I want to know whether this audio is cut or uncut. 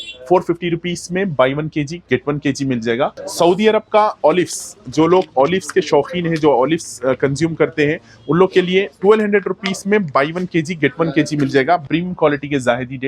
cut